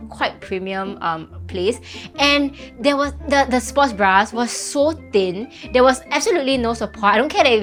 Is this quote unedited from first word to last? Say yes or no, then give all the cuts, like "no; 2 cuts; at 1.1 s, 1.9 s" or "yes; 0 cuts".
yes; 0 cuts